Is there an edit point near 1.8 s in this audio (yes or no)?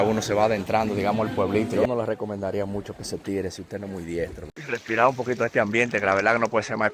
yes